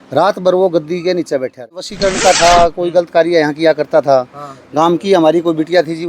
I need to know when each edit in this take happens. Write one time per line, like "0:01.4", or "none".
0:01.9

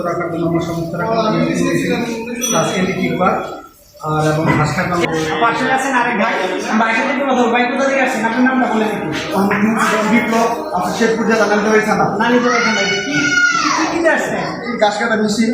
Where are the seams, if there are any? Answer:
0:05.1

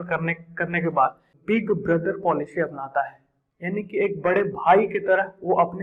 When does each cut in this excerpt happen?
0:01.3

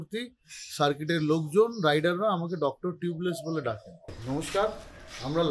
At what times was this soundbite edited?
0:04.2

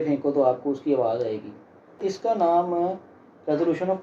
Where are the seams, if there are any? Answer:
0:02.0

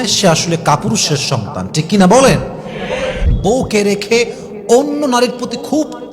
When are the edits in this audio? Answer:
0:03.2

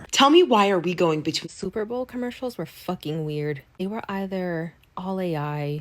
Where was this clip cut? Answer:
0:01.8

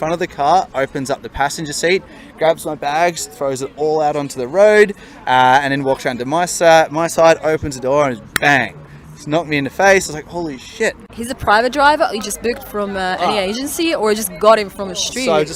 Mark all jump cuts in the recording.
none

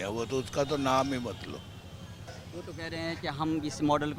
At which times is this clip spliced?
none

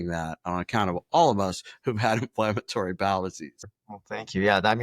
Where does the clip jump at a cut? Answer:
0:03.5

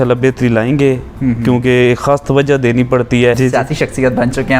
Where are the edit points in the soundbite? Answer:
0:03.4

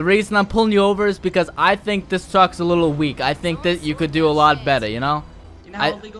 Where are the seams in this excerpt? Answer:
none

